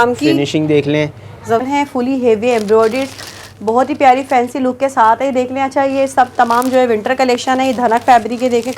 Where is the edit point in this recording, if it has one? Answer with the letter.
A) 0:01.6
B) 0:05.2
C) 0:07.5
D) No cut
A